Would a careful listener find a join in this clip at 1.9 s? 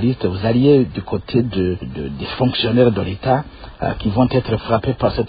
yes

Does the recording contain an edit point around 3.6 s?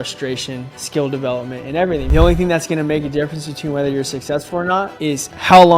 no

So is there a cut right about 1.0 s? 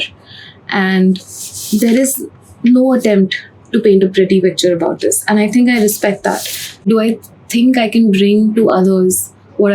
no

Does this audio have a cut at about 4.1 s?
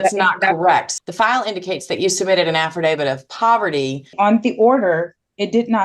yes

